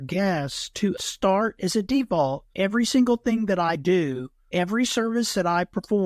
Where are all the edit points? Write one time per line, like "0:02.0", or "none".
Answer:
0:01.0
0:02.5
0:04.3